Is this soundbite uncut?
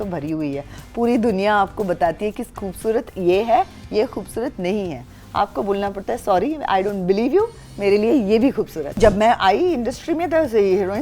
no; 1 cut; at 9.0 s

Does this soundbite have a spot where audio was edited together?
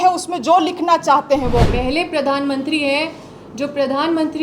yes; 1 cut; at 1.6 s

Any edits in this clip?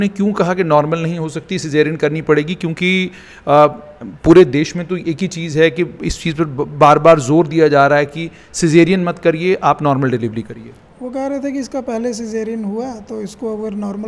no; 0 cuts

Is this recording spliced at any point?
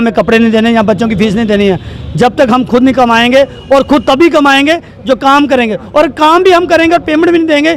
no; 0 cuts

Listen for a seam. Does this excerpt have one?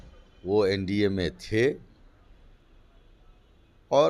no; 0 cuts

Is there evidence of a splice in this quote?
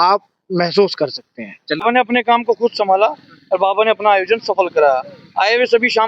yes; 1 cut; at 1.8 s

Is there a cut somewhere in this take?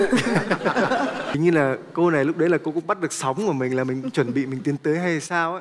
yes; 1 cut; at 1.3 s

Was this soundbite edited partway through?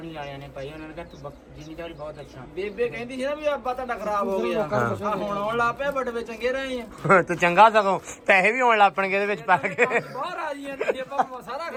no; 0 cuts

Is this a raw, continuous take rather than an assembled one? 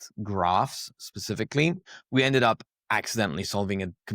no; 1 cut; at 1.9 s

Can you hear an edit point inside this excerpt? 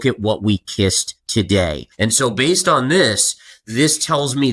yes; 2 cuts; at 1.1 s, 1.8 s

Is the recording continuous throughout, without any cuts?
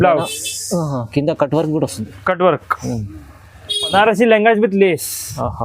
no; 1 cut; at 3.9 s

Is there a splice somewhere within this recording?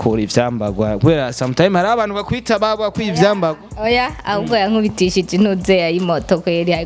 no; 0 cuts

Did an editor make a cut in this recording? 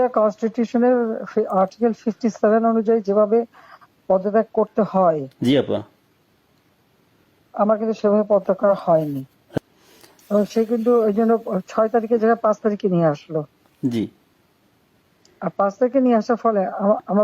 yes; 1 cut; at 9.6 s

